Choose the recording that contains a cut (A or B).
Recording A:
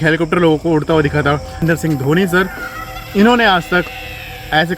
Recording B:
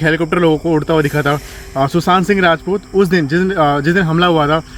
A